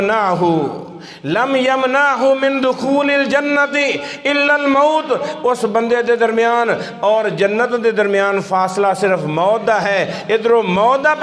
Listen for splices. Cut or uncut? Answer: uncut